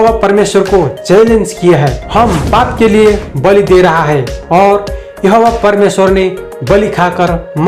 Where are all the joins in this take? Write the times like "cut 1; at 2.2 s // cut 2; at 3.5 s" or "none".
cut 1; at 2.0 s